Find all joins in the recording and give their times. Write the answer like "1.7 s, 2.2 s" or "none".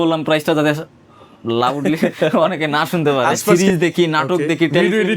3.5 s